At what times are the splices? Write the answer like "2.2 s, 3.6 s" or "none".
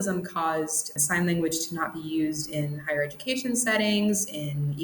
1.0 s